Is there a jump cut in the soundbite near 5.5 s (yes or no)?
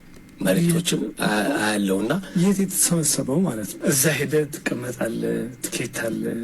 no